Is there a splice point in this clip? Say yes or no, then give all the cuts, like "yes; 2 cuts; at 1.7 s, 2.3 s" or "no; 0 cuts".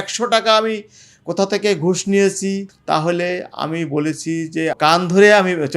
yes; 2 cuts; at 2.7 s, 4.8 s